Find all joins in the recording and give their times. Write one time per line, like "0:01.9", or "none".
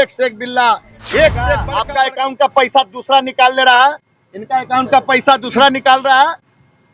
0:01.7

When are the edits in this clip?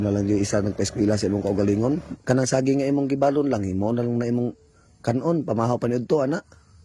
0:02.1

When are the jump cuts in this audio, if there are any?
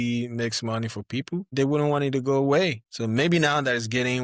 0:01.5
0:02.9

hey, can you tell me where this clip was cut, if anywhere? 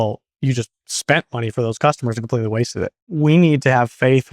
0:03.1

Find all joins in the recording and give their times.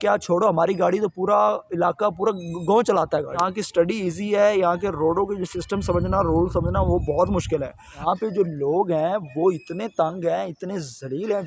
0:03.4
0:07.9

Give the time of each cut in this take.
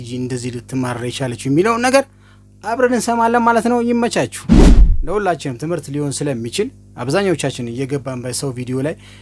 0:04.8

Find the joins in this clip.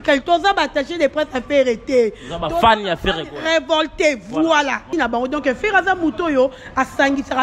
0:04.9

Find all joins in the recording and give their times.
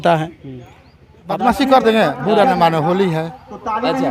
0:01.4

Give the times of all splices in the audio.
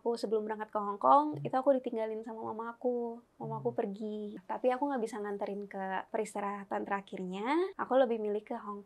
0:04.4
0:06.1
0:07.8

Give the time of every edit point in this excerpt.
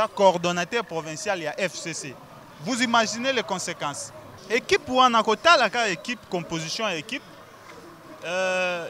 0:04.3

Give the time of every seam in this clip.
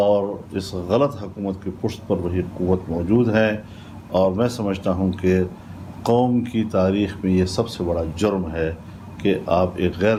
none

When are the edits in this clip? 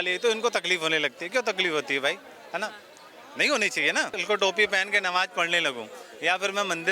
0:04.2

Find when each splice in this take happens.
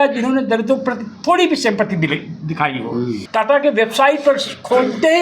0:03.2

